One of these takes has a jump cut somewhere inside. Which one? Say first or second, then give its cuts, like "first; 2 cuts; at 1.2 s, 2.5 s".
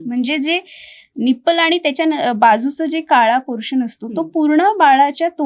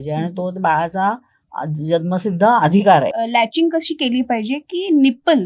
second; 1 cut; at 3.1 s